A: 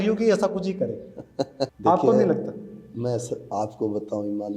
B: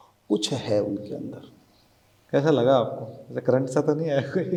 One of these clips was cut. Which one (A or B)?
A